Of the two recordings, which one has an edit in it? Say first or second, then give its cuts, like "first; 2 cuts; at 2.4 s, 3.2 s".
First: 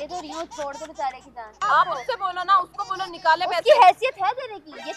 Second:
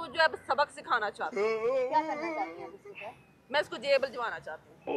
first; 1 cut; at 1.6 s